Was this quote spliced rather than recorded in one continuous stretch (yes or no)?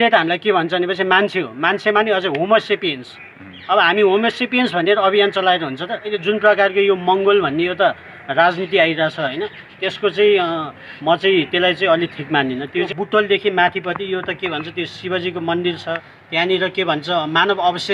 yes